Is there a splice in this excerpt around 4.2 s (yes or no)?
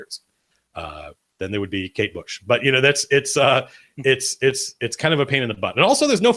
yes